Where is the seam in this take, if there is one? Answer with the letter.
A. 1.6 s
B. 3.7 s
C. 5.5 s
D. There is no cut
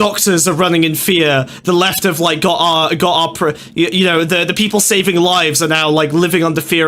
D